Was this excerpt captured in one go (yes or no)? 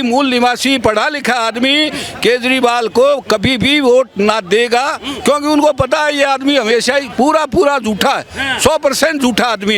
yes